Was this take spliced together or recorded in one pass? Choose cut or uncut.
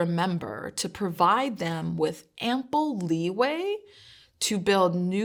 uncut